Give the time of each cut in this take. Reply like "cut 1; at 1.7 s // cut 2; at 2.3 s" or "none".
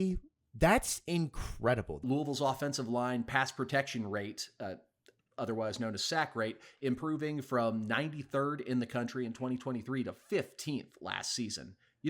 cut 1; at 2.0 s

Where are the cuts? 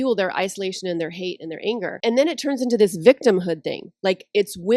cut 1; at 2.0 s

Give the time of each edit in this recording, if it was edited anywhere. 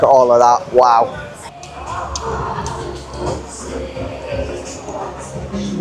cut 1; at 1.4 s

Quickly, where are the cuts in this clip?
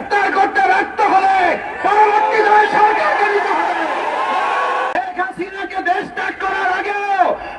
cut 1; at 4.9 s

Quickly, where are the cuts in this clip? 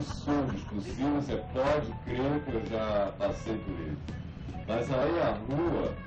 cut 1; at 1.7 s

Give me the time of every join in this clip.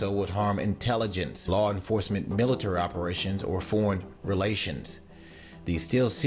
cut 1; at 3.5 s

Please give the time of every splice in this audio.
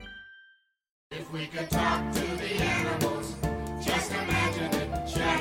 cut 1; at 1.0 s

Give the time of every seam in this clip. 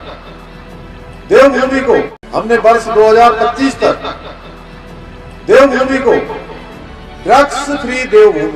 cut 1; at 2.2 s

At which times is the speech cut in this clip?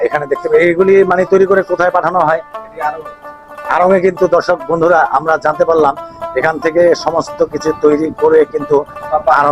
none

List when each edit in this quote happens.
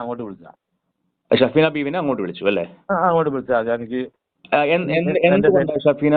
none

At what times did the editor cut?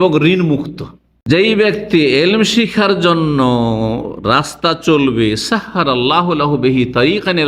cut 1; at 1.3 s

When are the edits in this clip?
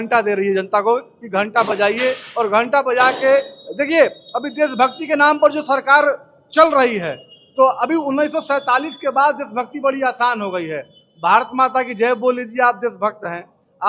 none

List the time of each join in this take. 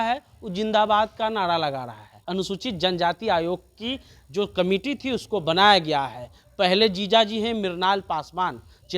cut 1; at 2.2 s

